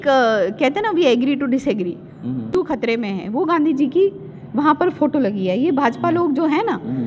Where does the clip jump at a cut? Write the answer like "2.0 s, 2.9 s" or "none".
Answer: 2.5 s